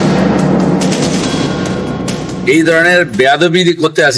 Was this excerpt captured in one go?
no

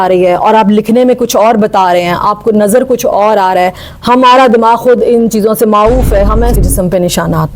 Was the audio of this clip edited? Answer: yes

